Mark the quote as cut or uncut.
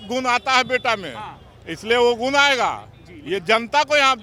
uncut